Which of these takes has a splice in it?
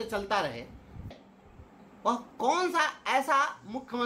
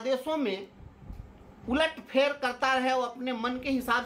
first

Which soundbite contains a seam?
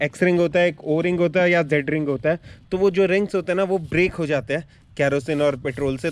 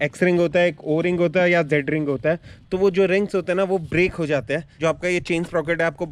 second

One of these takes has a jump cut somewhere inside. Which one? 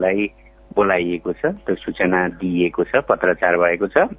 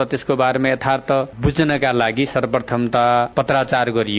second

